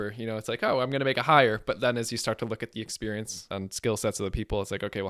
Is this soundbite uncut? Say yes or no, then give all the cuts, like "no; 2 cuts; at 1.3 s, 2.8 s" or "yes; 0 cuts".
no; 1 cut; at 3.4 s